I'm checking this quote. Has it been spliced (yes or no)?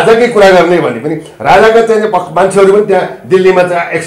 no